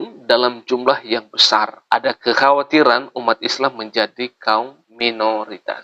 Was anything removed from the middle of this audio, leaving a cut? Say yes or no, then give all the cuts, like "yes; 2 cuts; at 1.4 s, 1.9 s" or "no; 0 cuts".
yes; 2 cuts; at 1.8 s, 4.8 s